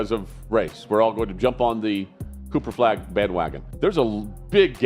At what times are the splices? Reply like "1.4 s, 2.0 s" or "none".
3.6 s